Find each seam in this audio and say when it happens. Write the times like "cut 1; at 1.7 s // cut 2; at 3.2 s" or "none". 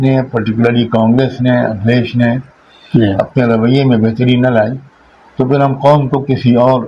none